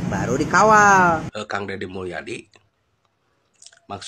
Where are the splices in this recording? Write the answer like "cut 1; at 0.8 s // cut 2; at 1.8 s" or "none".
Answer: cut 1; at 1.3 s